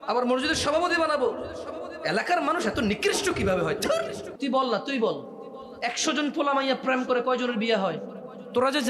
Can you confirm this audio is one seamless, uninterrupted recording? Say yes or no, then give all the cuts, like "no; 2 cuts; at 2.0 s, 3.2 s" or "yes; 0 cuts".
no; 1 cut; at 4.2 s